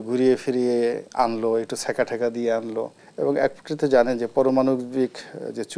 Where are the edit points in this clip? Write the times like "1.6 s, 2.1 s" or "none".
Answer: 3.0 s